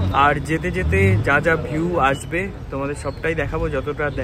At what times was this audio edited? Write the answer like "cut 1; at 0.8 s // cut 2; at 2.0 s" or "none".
none